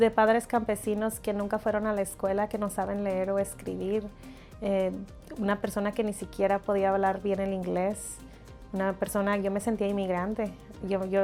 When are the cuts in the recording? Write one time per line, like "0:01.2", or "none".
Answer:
none